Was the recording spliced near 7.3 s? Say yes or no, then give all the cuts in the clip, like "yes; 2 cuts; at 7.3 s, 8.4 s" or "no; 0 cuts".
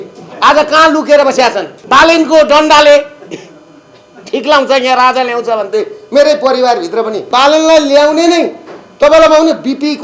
yes; 2 cuts; at 1.7 s, 7.3 s